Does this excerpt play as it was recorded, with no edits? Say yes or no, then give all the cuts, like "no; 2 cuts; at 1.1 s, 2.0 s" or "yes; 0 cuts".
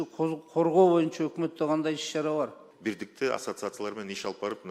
no; 1 cut; at 2.7 s